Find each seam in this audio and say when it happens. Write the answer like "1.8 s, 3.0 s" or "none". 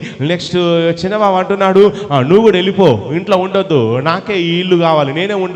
none